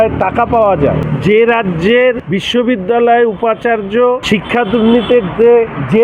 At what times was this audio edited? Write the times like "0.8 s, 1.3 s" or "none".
1.1 s, 2.3 s, 4.2 s

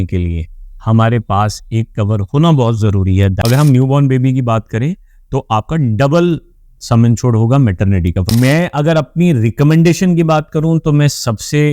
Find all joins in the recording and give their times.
3.4 s, 8.2 s

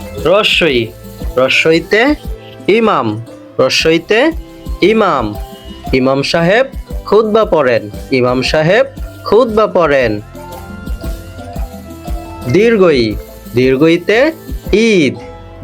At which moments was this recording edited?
none

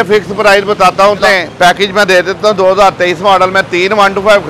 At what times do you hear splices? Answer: 1.2 s

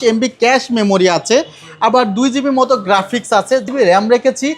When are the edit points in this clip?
3.6 s

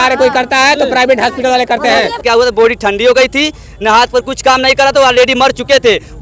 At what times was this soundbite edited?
2.2 s

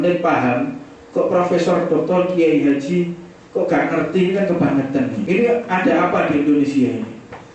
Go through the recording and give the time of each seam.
5.2 s

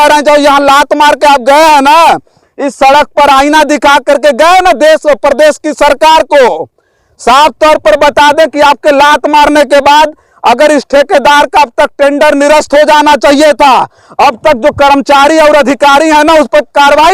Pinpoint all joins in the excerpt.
none

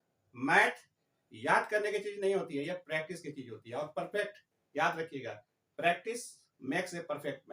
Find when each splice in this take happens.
none

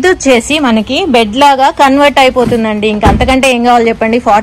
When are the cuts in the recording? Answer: none

